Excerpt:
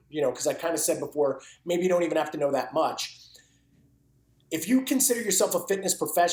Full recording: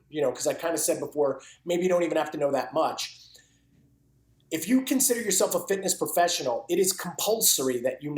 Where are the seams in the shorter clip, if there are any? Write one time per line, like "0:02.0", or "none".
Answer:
none

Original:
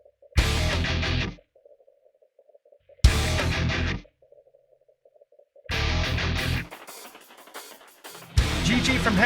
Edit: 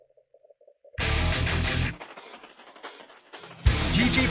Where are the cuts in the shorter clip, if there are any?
0:00.9

